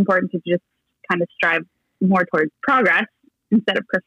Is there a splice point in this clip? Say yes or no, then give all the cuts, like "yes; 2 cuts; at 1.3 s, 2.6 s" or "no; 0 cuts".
yes; 1 cut; at 2.6 s